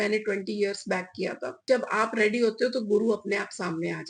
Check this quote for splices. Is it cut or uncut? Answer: cut